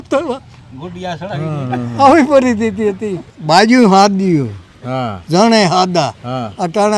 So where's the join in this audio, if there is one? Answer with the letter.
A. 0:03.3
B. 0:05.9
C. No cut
A